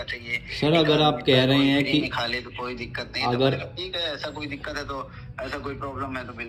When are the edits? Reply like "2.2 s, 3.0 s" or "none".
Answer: none